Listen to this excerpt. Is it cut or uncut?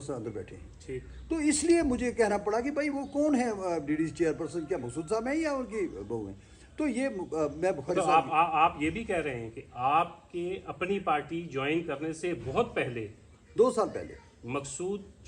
uncut